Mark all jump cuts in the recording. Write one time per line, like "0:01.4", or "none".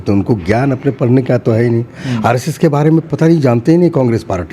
none